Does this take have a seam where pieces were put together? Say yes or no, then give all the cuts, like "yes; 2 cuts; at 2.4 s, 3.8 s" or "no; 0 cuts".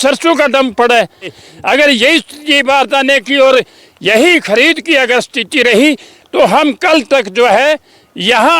yes; 1 cut; at 1.4 s